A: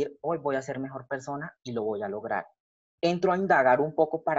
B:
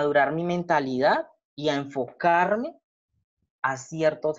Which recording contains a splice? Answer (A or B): A